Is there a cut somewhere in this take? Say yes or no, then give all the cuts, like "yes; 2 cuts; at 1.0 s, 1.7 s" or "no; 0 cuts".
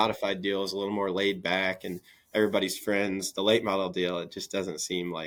no; 0 cuts